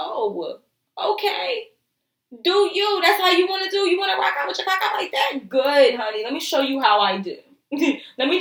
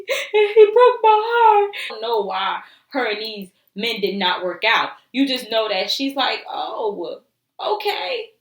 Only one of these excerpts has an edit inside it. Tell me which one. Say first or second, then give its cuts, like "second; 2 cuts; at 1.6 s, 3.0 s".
second; 1 cut; at 1.9 s